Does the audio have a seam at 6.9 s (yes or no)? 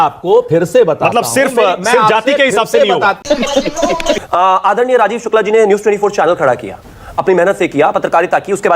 no